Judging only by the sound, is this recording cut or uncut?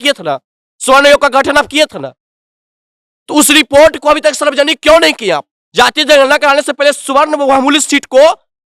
cut